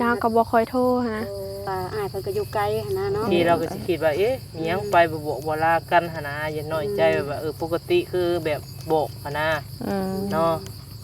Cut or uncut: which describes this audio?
cut